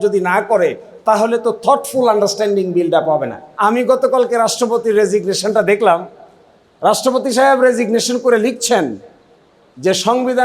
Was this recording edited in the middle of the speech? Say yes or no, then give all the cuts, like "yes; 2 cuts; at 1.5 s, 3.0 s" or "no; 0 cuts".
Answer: yes; 1 cut; at 3.4 s